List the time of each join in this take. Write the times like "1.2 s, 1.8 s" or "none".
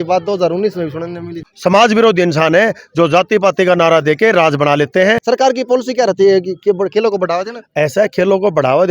1.4 s, 5.2 s